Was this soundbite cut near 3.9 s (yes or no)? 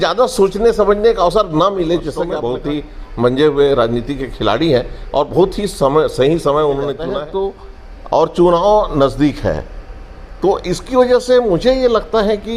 no